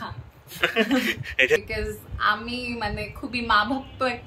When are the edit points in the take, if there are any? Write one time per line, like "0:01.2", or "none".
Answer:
0:01.6